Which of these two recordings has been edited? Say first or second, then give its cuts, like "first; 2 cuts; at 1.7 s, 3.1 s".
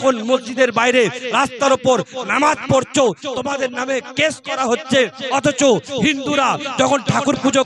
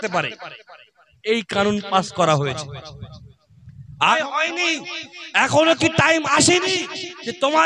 second; 1 cut; at 4.2 s